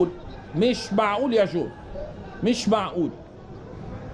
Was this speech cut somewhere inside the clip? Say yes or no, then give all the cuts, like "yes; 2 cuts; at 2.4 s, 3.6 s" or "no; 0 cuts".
no; 0 cuts